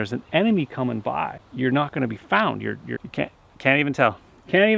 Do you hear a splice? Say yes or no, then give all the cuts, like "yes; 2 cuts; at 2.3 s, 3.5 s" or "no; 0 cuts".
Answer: yes; 2 cuts; at 1.4 s, 3.0 s